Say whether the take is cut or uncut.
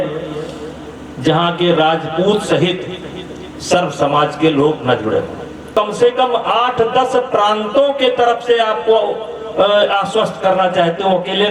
cut